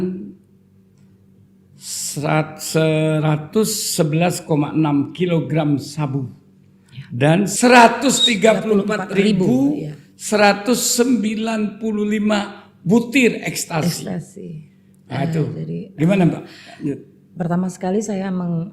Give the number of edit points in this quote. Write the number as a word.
one